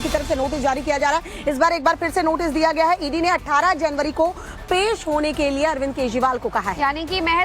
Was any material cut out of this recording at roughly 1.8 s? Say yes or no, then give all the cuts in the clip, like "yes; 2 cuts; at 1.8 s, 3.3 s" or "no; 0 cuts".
no; 1 cut; at 5.8 s